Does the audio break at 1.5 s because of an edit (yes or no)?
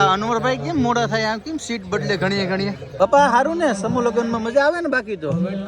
no